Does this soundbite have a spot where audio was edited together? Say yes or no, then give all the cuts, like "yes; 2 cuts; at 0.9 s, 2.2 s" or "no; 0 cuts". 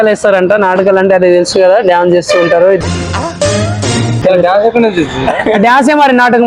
no; 0 cuts